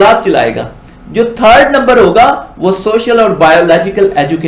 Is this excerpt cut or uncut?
uncut